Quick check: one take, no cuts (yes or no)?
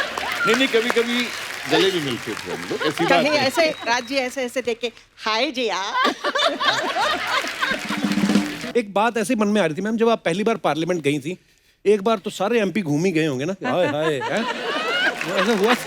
no